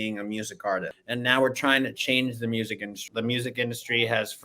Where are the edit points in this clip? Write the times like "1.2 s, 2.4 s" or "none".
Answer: 1.0 s, 3.0 s